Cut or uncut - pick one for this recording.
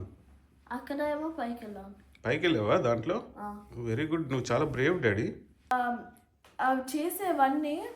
cut